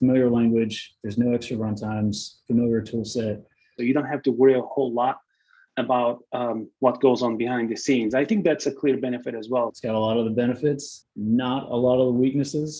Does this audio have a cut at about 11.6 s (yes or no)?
no